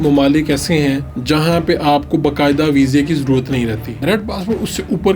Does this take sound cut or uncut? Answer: cut